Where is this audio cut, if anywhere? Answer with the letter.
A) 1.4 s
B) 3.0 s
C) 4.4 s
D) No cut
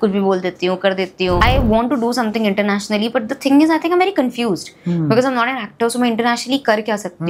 A